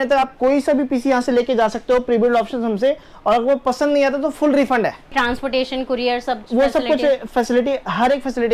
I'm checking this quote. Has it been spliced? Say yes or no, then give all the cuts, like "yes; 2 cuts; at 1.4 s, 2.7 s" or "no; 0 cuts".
yes; 1 cut; at 5.1 s